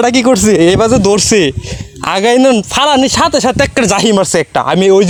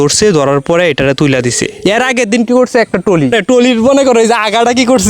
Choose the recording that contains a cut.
second; 2 cuts; at 1.7 s, 3.3 s

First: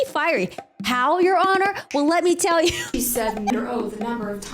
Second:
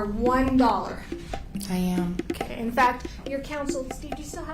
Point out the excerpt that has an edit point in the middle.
first; 1 cut; at 3.5 s

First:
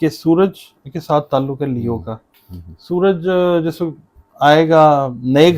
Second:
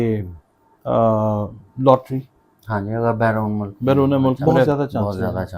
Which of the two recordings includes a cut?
second; 1 cut; at 4.7 s

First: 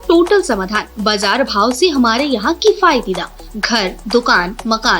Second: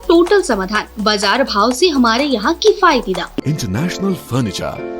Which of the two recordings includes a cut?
second; 1 cut; at 3.4 s

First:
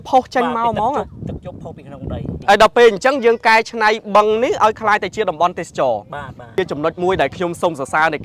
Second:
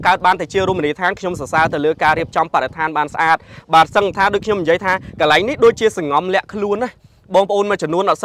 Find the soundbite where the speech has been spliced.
first; 2 cuts; at 2.4 s, 6.5 s

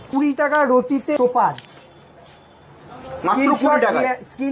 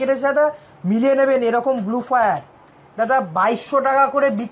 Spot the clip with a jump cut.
first; 1 cut; at 1.2 s

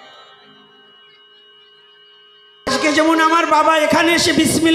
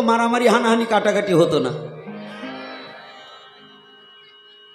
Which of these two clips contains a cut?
first; 1 cut; at 2.7 s

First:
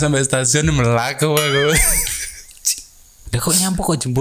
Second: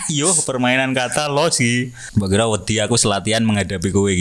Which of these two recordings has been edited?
second; 1 cut; at 2.0 s

